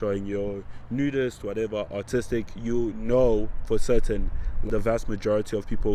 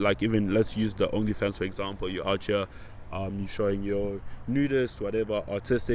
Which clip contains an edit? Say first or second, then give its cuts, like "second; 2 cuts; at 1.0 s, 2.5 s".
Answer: first; 1 cut; at 4.6 s